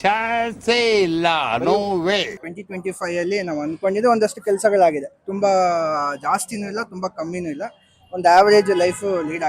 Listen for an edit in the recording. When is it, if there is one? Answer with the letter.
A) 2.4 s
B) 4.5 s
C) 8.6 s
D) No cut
A